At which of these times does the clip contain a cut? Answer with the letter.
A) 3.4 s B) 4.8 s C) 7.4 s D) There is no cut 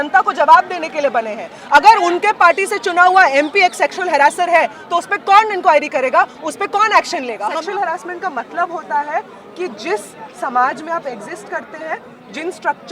C